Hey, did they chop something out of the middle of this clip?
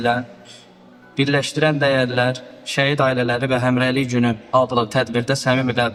no; 0 cuts

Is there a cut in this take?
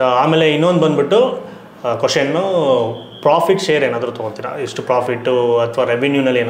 no; 0 cuts

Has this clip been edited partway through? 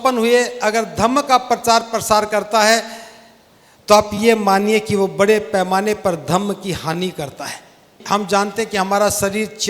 yes; 1 cut; at 8.0 s

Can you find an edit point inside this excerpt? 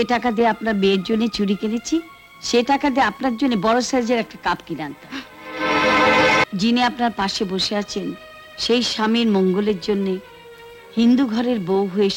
yes; 1 cut; at 6.4 s

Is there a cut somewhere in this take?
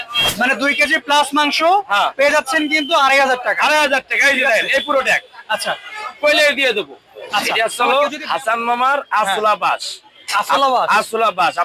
yes; 1 cut; at 7.5 s

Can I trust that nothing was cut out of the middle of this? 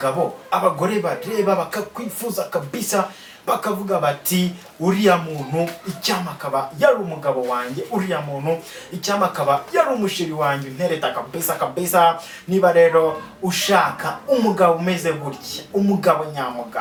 yes; 0 cuts

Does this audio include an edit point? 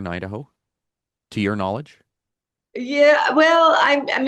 no; 0 cuts

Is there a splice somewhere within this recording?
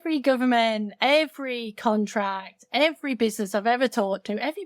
no; 0 cuts

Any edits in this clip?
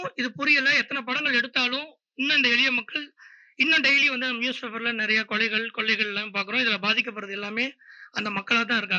no; 0 cuts

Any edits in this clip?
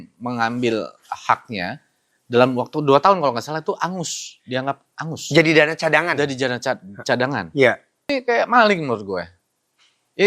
yes; 1 cut; at 8.1 s

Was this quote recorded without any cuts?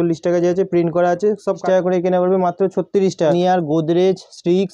no; 2 cuts; at 1.6 s, 3.3 s

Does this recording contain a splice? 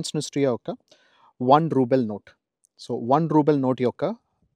no; 0 cuts

